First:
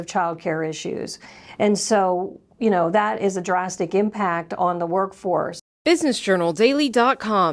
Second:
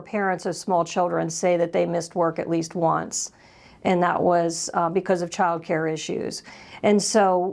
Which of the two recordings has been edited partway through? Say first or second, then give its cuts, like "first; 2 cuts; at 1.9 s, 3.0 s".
first; 1 cut; at 5.6 s